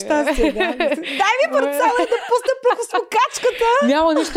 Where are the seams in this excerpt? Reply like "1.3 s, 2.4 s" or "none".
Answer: none